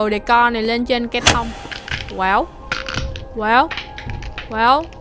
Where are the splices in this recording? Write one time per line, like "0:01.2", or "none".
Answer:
none